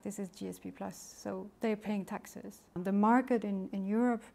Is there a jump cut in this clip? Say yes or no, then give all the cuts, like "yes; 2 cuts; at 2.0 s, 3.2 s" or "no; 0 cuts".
yes; 1 cut; at 2.8 s